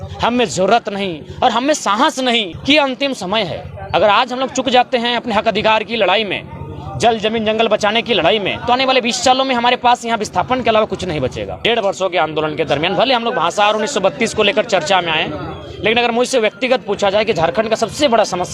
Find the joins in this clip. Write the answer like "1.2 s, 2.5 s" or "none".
2.5 s, 11.5 s